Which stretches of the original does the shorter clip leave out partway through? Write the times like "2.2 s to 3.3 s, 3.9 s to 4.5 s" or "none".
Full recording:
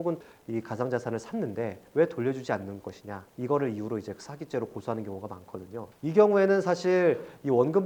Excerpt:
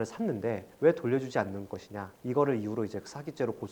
none